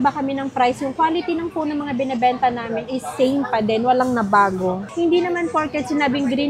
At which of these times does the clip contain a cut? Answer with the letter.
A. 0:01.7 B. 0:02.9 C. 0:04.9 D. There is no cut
C